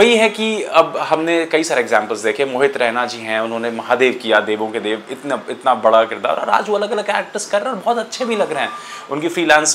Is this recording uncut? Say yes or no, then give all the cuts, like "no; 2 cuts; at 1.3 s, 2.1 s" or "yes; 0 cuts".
yes; 0 cuts